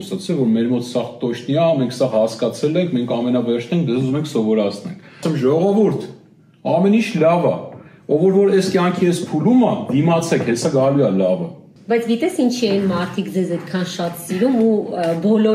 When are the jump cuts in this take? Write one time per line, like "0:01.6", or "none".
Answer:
0:05.2
0:11.7